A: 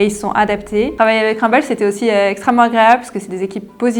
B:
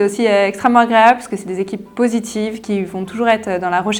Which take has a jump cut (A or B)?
A